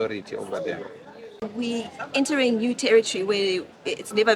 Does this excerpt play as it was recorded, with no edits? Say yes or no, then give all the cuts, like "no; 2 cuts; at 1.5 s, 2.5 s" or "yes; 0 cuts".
no; 1 cut; at 1.4 s